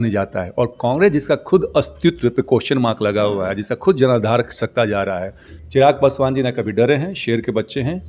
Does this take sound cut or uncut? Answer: cut